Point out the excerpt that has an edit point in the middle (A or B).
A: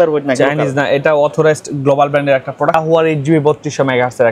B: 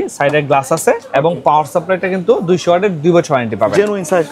A